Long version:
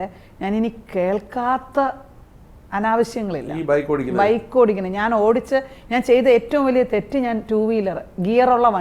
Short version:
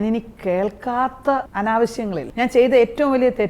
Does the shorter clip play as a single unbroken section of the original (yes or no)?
no